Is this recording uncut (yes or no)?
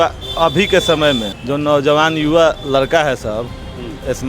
no